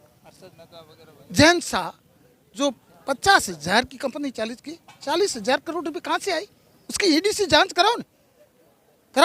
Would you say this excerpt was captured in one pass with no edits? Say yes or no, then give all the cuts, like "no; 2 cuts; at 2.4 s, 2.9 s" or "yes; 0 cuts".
yes; 0 cuts